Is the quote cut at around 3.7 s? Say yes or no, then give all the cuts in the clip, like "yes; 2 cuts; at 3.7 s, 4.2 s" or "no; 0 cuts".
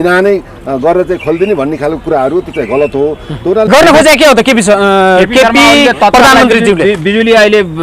yes; 1 cut; at 3.7 s